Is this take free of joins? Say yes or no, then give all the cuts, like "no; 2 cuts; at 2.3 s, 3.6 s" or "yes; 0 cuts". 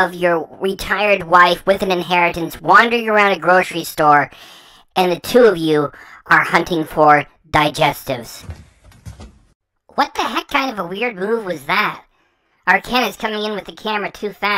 no; 1 cut; at 8.4 s